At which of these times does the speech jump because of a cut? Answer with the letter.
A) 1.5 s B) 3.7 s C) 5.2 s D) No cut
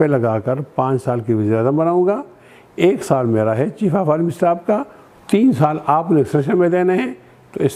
D